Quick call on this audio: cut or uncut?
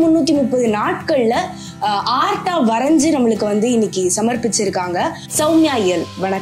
cut